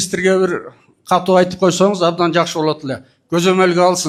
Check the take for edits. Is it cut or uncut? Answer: uncut